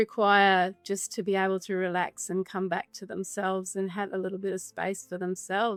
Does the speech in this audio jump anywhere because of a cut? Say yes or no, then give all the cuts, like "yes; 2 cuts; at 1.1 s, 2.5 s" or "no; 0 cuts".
no; 0 cuts